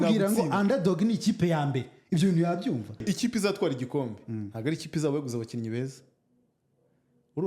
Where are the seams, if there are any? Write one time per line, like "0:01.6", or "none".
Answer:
0:03.1